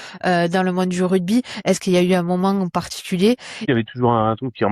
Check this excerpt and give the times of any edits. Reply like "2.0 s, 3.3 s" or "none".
3.6 s